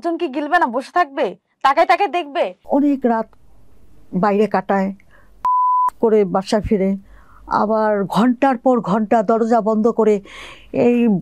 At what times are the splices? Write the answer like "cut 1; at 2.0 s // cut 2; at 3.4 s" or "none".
cut 1; at 2.5 s